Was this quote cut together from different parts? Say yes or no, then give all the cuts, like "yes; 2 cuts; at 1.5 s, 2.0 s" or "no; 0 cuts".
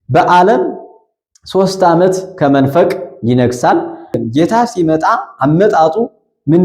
yes; 1 cut; at 4.2 s